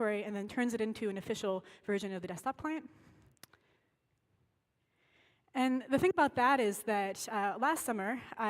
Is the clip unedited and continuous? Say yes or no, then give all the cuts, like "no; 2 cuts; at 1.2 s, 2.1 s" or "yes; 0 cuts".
no; 1 cut; at 3.8 s